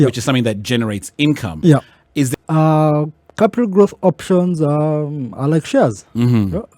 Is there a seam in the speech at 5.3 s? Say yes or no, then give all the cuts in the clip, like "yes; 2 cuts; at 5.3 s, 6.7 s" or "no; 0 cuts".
no; 1 cut; at 2.3 s